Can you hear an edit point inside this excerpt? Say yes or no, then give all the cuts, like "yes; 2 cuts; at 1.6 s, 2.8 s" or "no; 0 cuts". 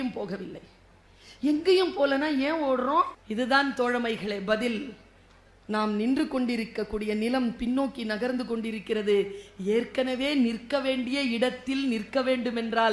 yes; 1 cut; at 3.2 s